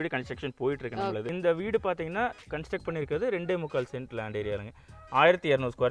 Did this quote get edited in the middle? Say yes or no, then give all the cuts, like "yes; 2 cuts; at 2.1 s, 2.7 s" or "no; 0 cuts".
yes; 1 cut; at 1.3 s